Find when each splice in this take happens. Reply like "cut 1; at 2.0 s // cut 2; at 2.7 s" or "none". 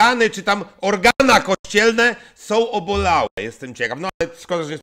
none